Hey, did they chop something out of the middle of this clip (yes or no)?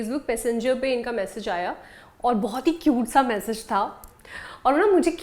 no